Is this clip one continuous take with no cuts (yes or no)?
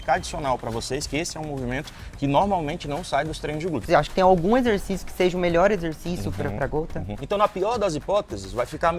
no